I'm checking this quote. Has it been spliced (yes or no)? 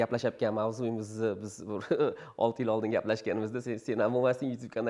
no